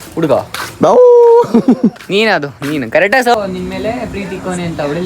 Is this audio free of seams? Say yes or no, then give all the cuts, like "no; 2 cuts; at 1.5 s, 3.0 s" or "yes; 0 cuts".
no; 1 cut; at 3.4 s